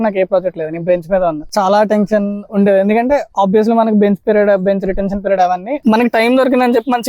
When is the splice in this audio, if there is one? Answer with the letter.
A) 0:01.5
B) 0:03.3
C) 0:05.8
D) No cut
C